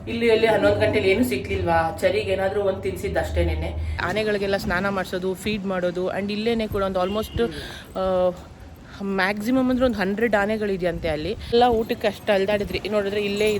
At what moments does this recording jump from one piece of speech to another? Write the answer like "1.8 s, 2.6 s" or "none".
4.1 s, 11.5 s

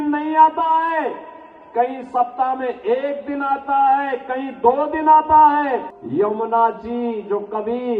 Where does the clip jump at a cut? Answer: 6.0 s

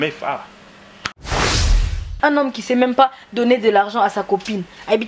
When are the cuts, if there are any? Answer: 1.6 s

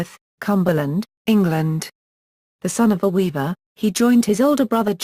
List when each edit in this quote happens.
3.7 s

